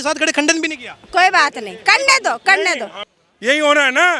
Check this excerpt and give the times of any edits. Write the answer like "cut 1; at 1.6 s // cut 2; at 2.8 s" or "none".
cut 1; at 3.1 s